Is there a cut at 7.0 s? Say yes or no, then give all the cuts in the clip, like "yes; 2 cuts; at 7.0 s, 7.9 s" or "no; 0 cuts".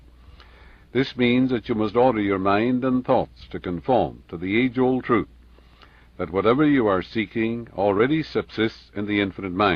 no; 0 cuts